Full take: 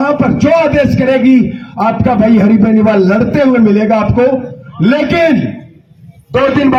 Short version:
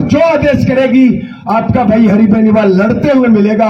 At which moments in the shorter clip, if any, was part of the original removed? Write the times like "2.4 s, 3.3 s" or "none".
none